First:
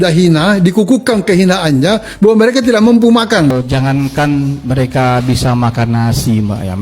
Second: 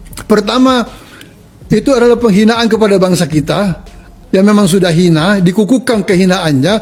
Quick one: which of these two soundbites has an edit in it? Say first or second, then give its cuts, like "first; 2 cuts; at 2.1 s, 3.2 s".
first; 1 cut; at 3.5 s